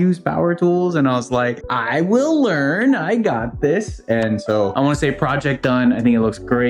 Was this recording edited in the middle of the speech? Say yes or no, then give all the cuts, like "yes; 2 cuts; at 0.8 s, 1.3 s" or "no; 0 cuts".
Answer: yes; 1 cut; at 4.7 s